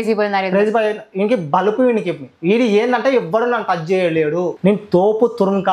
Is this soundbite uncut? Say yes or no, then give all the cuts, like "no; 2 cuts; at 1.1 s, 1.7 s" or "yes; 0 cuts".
no; 1 cut; at 4.5 s